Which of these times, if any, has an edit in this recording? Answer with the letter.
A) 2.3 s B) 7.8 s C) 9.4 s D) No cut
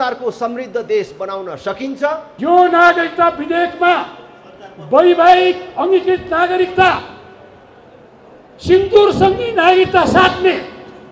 A